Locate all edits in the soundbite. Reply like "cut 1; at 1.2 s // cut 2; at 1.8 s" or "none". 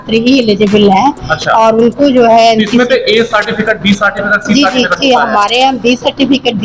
none

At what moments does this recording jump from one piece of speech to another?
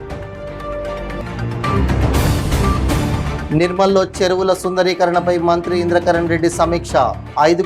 cut 1; at 1.2 s

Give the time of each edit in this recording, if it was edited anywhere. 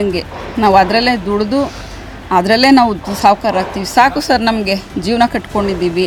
none

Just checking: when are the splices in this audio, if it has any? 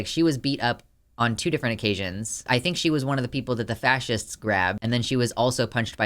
cut 1; at 2.4 s

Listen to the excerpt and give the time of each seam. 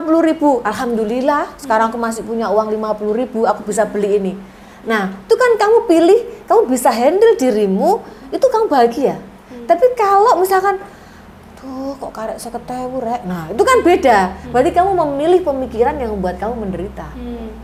none

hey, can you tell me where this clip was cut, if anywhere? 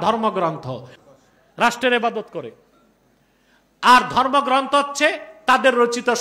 cut 1; at 0.9 s

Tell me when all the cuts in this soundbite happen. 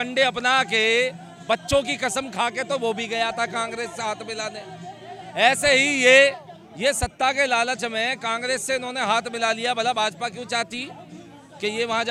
none

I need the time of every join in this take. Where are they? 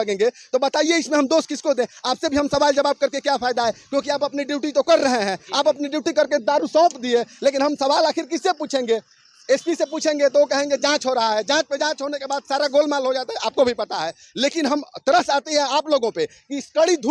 none

